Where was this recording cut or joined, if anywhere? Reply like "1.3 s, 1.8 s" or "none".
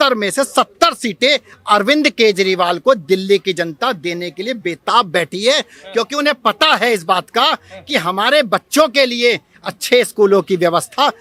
none